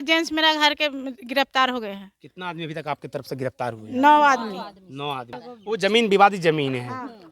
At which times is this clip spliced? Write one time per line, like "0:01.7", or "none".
0:05.3